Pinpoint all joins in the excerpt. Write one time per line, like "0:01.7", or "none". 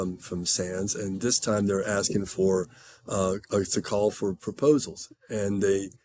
none